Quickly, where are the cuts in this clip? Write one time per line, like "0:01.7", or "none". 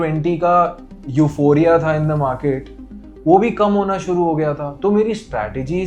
none